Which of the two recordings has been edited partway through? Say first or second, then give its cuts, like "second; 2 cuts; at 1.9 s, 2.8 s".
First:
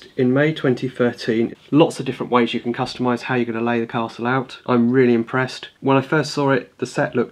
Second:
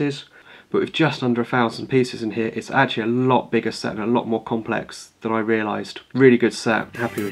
first; 3 cuts; at 1.5 s, 4.6 s, 5.6 s